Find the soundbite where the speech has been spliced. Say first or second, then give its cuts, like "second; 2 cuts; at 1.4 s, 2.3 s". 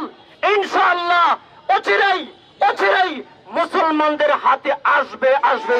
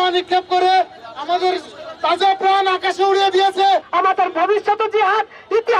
second; 1 cut; at 3.9 s